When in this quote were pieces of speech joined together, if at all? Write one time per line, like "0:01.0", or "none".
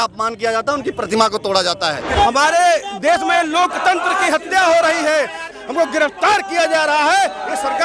0:02.0
0:05.5